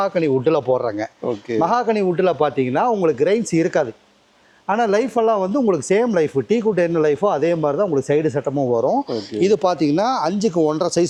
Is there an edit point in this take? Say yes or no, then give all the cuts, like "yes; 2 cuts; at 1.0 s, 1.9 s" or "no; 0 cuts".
no; 0 cuts